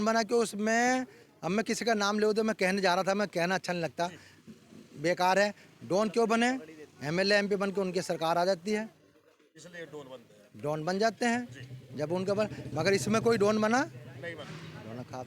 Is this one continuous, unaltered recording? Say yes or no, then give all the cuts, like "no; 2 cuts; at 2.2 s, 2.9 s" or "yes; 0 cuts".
yes; 0 cuts